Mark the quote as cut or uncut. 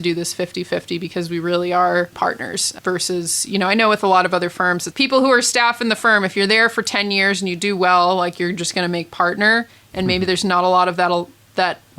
cut